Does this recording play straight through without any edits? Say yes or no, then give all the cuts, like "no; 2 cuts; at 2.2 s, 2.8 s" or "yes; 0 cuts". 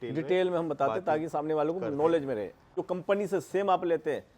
no; 1 cut; at 2.8 s